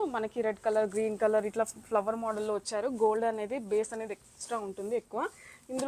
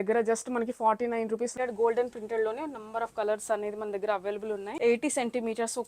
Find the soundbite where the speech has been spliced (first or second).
second